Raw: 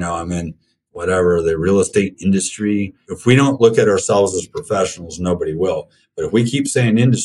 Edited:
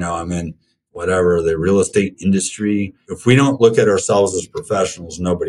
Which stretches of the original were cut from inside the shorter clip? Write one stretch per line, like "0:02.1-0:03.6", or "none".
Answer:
none